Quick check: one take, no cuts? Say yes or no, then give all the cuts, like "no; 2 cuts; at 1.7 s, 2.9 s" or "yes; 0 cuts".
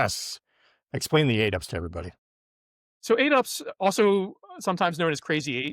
yes; 0 cuts